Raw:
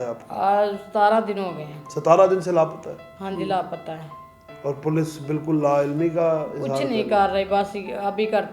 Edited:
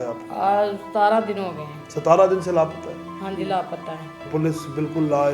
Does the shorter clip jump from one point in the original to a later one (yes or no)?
yes